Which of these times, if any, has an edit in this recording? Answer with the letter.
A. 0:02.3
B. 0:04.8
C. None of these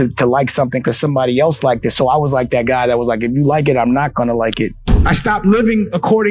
B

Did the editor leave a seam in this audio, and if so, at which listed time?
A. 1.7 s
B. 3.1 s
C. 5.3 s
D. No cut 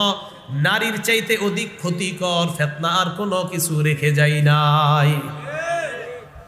D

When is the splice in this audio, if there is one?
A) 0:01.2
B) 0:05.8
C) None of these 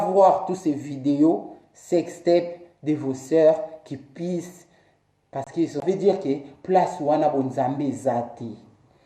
B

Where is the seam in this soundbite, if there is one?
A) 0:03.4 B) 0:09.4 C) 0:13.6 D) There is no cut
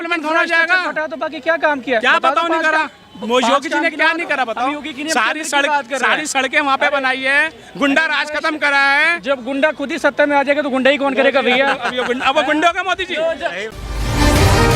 C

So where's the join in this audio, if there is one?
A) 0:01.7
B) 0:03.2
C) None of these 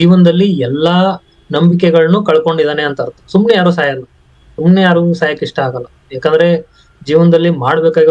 C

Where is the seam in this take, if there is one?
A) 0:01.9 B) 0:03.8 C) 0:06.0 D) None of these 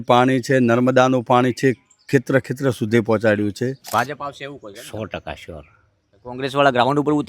B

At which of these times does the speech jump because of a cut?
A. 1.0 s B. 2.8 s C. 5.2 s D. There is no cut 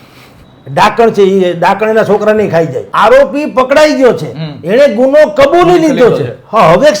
B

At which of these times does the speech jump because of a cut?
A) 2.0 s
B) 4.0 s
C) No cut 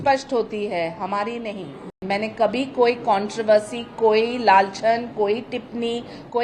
A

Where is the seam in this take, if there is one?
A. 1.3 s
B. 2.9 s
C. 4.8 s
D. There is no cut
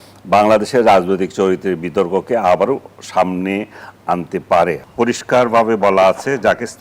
C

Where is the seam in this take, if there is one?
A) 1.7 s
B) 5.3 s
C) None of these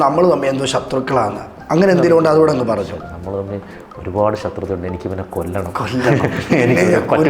C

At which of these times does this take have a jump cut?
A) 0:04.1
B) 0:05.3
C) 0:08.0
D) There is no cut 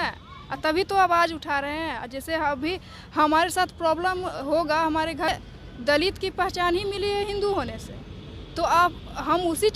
B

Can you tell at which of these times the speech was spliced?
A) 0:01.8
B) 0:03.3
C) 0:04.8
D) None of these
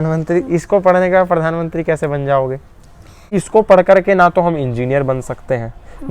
B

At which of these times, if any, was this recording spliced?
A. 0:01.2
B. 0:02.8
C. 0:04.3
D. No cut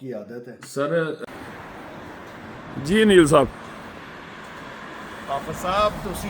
A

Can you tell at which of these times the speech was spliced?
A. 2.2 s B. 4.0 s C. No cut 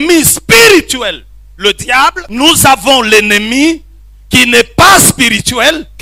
A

